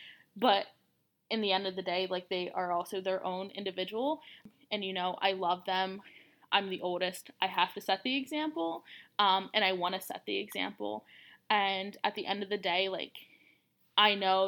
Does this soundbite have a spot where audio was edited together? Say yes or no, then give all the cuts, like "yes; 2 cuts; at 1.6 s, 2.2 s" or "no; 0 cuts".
yes; 1 cut; at 4.4 s